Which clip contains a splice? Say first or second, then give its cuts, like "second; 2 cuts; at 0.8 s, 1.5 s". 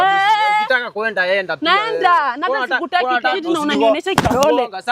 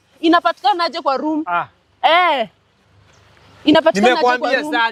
first; 1 cut; at 3.4 s